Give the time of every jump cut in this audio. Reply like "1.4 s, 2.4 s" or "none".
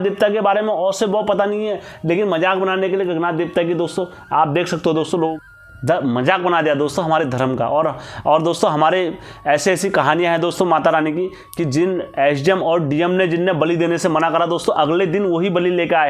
5.4 s